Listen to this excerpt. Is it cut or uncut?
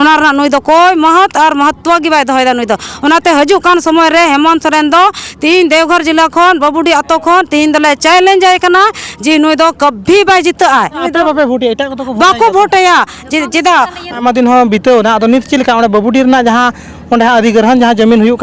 cut